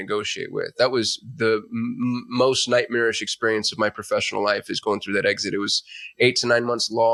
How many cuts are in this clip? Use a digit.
0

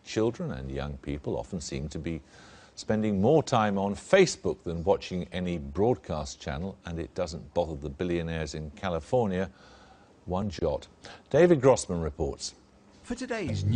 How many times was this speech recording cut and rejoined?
1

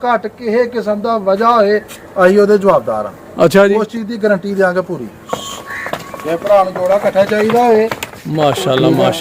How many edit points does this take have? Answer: 1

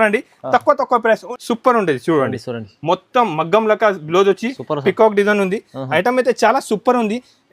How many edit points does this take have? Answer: 1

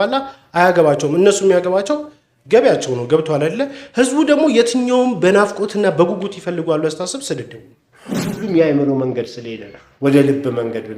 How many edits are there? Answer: 1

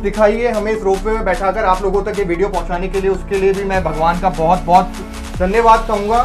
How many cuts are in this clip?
0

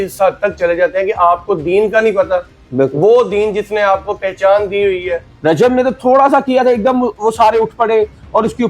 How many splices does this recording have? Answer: 1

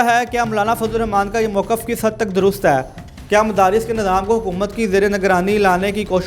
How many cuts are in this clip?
0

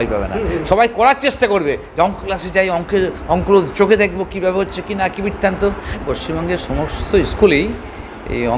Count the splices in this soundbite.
1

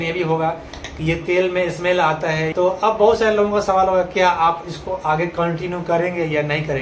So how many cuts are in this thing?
1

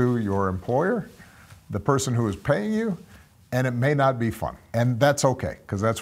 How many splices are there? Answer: 1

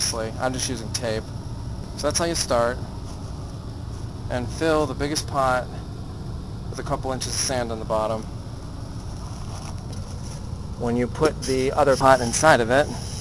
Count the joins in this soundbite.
1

